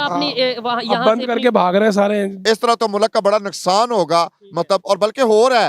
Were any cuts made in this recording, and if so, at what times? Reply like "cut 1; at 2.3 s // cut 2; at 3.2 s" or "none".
cut 1; at 2.4 s